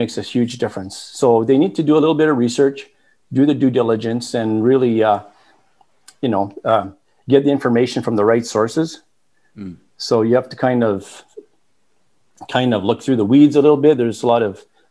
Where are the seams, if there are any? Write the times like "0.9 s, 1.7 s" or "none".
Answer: none